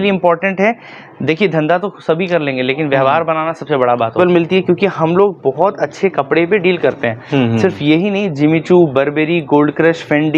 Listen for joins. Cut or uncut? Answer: cut